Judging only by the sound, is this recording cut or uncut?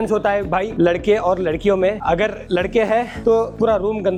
uncut